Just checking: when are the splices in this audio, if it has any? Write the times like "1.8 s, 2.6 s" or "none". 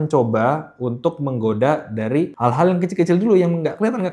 2.3 s